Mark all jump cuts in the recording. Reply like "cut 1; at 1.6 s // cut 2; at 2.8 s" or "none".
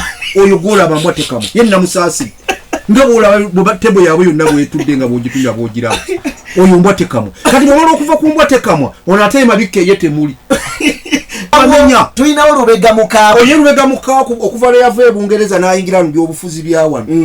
cut 1; at 11.5 s